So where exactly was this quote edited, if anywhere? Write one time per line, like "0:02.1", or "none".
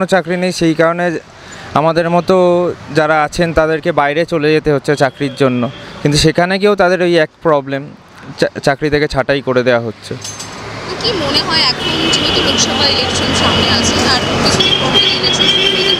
none